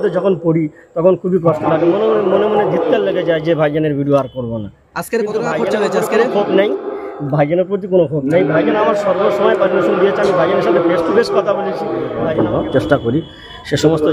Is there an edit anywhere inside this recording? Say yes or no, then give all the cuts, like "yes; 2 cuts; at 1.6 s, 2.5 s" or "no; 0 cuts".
yes; 1 cut; at 12.3 s